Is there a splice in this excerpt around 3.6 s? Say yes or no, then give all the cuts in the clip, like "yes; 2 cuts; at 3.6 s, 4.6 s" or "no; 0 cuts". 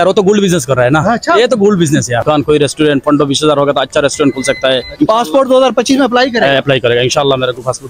no; 2 cuts; at 2.2 s, 4.9 s